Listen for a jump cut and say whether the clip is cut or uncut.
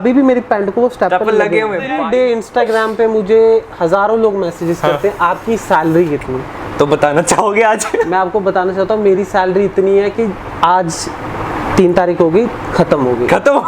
cut